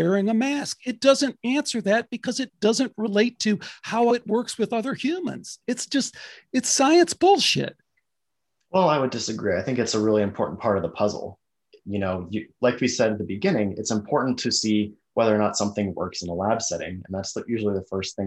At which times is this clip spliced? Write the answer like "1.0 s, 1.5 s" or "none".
4.1 s

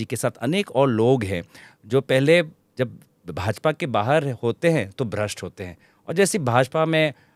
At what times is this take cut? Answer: none

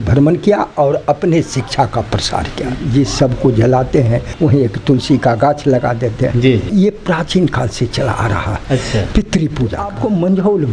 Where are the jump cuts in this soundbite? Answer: 2.7 s, 4.3 s, 6.7 s, 9.9 s

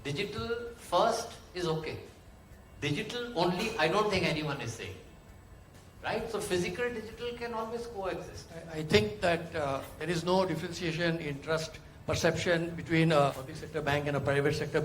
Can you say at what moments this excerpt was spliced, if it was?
8.6 s, 13.4 s

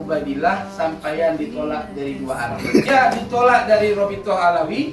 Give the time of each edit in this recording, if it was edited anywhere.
2.9 s

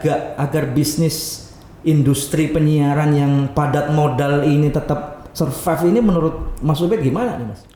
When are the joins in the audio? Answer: none

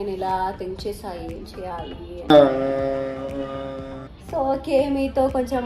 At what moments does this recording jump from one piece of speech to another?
2.2 s

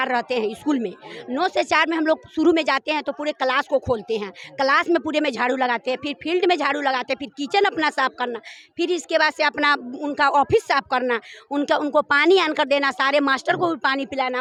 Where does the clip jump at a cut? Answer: none

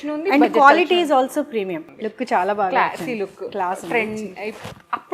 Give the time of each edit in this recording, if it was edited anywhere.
1.9 s

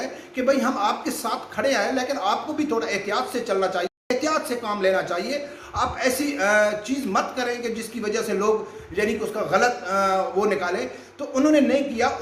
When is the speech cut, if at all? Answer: none

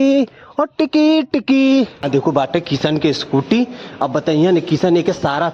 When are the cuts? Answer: 2.0 s

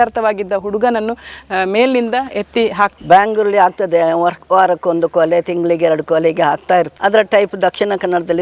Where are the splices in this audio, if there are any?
2.9 s, 6.9 s

